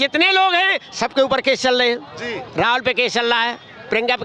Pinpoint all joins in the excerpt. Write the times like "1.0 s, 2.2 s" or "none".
none